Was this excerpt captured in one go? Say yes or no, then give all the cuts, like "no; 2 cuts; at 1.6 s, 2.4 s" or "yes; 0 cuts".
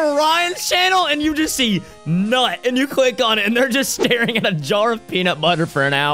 yes; 0 cuts